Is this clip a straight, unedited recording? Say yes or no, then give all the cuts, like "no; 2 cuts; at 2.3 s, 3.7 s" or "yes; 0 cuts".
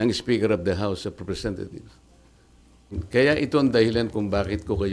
no; 1 cut; at 3.0 s